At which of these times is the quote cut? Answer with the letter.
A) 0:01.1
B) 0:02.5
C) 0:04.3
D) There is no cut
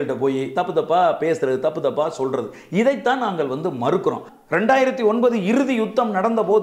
C